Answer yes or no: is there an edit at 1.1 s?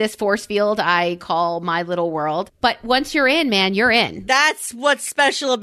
no